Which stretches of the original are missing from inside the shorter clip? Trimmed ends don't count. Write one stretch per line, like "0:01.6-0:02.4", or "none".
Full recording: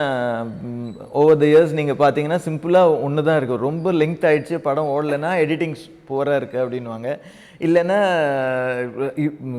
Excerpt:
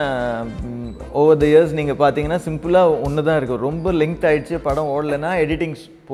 none